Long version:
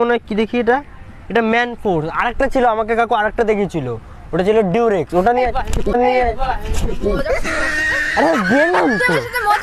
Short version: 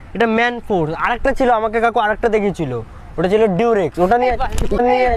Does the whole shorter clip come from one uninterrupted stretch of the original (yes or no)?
yes